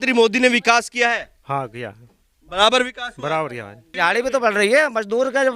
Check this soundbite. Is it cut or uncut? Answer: cut